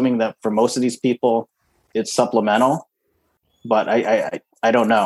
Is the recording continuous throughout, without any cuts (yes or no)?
no